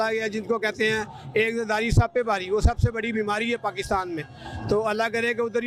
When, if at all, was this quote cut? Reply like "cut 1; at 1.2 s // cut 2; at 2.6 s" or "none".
none